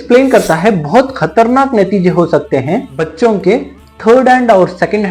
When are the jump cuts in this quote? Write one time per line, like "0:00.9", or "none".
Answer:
none